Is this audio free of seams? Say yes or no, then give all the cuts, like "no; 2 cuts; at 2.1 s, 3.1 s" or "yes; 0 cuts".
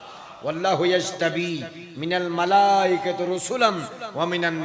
yes; 0 cuts